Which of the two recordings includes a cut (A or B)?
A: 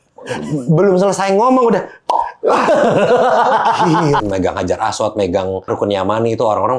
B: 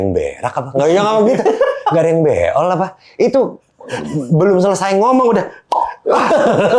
A